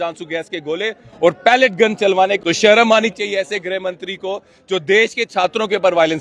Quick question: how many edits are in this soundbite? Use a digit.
1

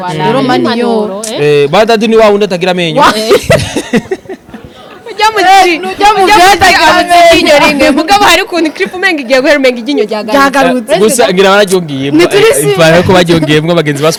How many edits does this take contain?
0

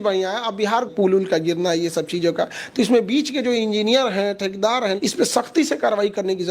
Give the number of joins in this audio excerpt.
2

